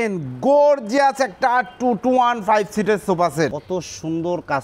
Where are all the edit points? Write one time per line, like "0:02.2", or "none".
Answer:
0:03.6